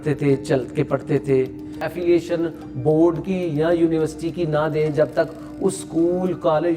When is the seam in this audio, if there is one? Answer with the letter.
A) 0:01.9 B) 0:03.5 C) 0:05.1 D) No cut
A